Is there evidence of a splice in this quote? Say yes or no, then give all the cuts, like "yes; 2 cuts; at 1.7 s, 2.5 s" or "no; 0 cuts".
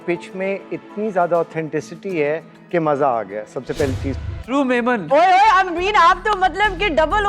yes; 1 cut; at 4.1 s